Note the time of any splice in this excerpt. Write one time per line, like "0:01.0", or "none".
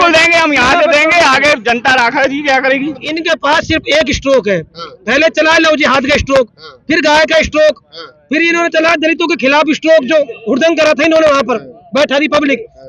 0:03.1